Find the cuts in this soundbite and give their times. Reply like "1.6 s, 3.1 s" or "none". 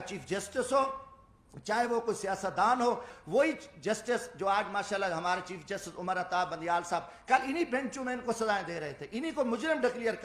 3.1 s